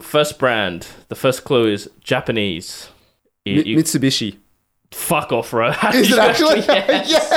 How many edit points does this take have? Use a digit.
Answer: 0